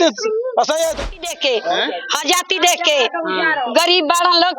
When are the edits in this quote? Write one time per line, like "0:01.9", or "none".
0:01.0

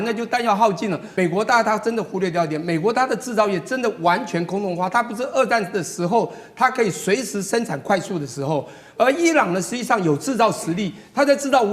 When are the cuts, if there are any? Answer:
0:01.0

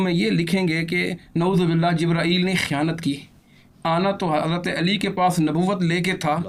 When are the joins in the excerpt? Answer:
none

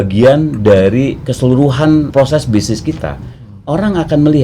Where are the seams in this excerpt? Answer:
0:02.1

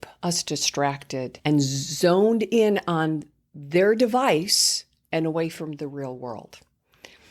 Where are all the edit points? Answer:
0:01.3

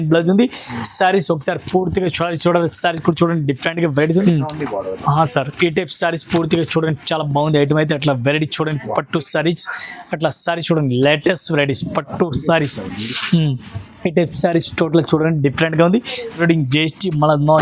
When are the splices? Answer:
0:04.2
0:16.4

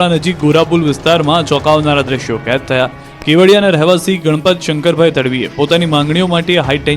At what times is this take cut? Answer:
0:05.4

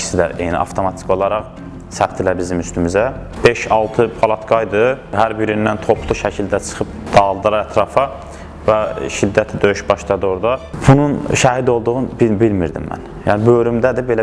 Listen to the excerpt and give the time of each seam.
0:03.3
0:05.1
0:07.0
0:10.7

